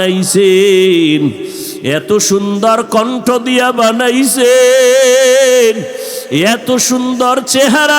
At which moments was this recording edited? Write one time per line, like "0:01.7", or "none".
none